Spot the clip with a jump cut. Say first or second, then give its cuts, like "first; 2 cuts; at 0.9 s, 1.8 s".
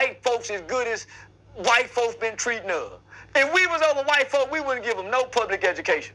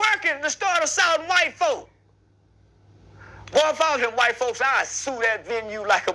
first; 1 cut; at 3.0 s